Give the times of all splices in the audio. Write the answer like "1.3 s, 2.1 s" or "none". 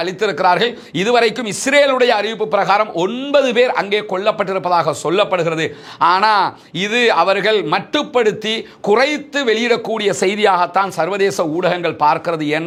none